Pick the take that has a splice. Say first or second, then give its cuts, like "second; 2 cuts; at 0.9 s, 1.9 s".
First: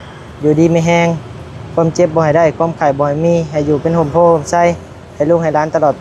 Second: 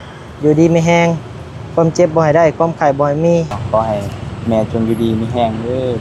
second; 1 cut; at 3.5 s